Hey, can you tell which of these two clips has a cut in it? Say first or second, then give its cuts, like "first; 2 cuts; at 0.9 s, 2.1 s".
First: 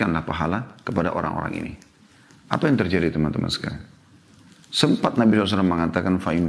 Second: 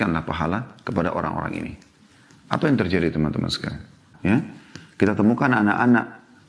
second; 1 cut; at 4.1 s